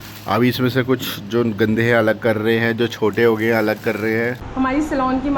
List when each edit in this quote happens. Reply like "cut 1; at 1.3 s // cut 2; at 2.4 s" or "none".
cut 1; at 4.4 s

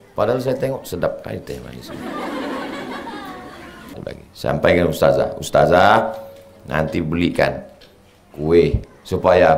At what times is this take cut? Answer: cut 1; at 4.0 s

